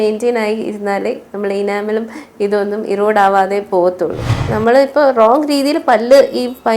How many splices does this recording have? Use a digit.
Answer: 1